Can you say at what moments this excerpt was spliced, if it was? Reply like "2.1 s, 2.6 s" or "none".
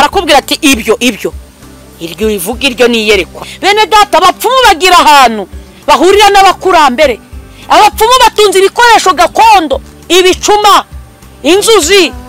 3.4 s